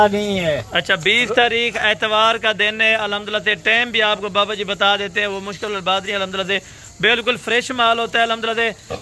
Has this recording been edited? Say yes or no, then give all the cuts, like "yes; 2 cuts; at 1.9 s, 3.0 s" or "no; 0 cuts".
no; 0 cuts